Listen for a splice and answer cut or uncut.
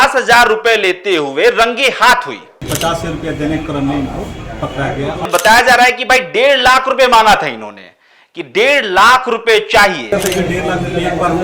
cut